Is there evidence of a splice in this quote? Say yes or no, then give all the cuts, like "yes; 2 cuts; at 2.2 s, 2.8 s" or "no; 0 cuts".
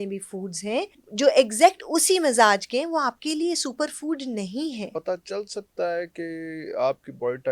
yes; 2 cuts; at 1.0 s, 4.9 s